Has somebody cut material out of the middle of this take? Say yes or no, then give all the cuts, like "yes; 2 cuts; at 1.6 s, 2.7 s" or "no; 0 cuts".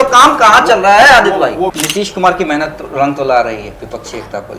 yes; 1 cut; at 1.7 s